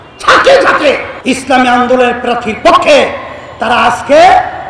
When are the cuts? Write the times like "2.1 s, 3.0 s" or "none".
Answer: 1.1 s